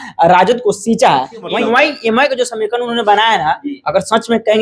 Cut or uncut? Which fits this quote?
cut